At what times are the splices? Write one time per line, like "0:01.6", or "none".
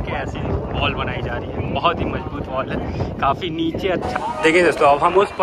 0:04.1